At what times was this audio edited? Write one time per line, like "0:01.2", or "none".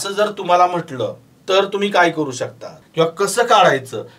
0:01.3
0:02.7